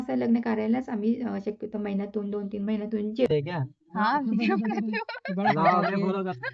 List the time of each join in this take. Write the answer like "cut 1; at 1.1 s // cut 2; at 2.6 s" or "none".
cut 1; at 3.3 s